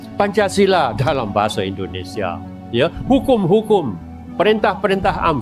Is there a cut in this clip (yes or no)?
no